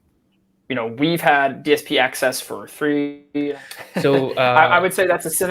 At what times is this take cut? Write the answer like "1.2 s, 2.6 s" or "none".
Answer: 3.6 s